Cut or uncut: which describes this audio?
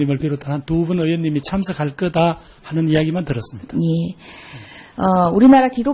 uncut